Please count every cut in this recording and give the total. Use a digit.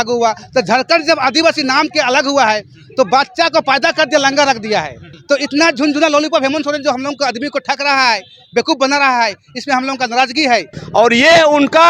2